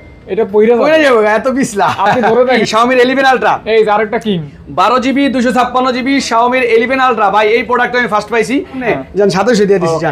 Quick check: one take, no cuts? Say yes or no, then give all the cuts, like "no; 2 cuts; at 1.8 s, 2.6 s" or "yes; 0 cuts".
no; 2 cuts; at 2.6 s, 8.8 s